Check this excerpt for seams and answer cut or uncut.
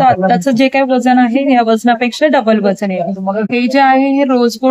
cut